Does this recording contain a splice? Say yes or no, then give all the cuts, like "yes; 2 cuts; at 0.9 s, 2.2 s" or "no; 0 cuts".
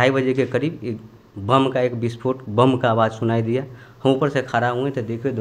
no; 0 cuts